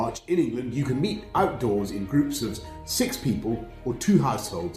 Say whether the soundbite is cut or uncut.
uncut